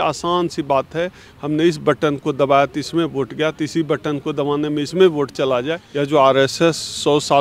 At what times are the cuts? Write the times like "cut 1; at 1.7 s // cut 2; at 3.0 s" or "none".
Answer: cut 1; at 5.8 s